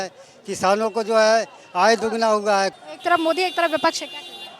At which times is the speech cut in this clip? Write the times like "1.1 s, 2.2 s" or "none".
2.8 s